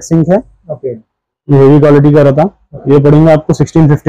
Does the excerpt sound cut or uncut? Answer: uncut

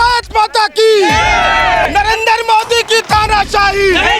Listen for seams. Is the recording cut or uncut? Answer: cut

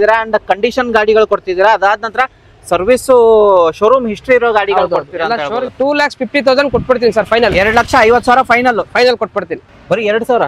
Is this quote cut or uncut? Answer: cut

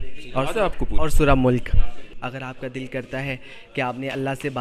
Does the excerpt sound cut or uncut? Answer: cut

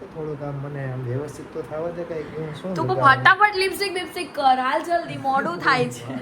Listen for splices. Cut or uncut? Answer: uncut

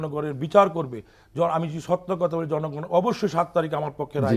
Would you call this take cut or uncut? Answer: uncut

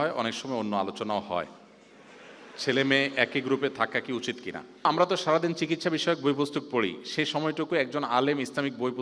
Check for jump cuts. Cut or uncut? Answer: cut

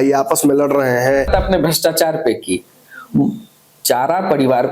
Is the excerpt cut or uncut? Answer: cut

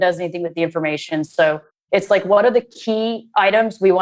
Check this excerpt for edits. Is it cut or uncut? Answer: uncut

